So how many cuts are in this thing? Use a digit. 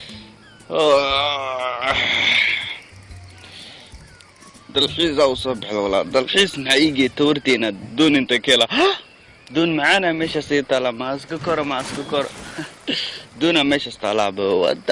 1